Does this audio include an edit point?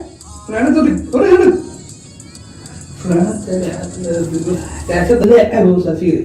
yes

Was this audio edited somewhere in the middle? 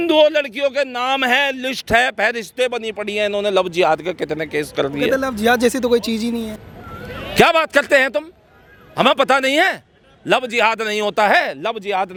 no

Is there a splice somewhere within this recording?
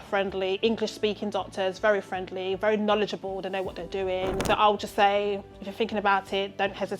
yes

